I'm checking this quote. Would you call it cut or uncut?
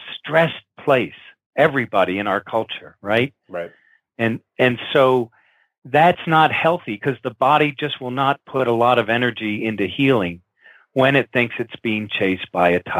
uncut